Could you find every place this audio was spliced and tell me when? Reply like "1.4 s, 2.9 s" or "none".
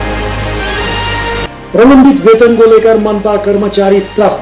1.2 s

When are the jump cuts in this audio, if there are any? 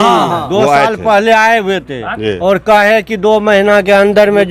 none

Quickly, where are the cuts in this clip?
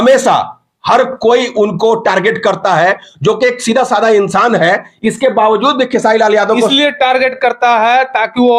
none

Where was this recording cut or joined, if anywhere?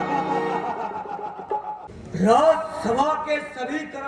1.9 s

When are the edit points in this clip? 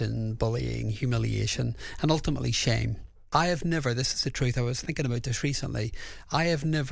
3.2 s

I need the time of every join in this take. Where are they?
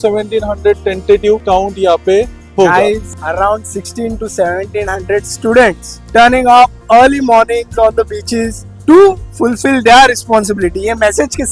1.4 s, 3.1 s

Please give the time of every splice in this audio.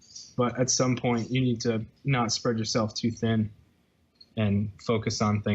1.9 s

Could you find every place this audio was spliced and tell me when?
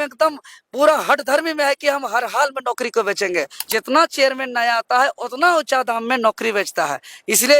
3.7 s

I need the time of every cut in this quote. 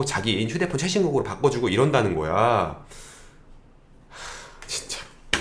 none

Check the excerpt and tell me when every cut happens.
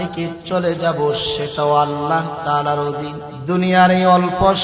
3.3 s

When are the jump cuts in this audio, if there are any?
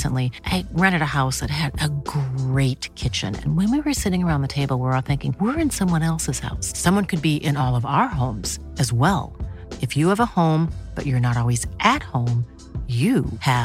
none

